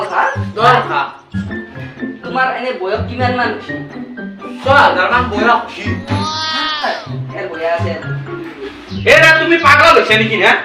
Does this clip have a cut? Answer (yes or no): yes